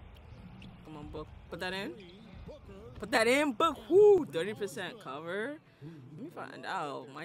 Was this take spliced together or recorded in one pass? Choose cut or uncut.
uncut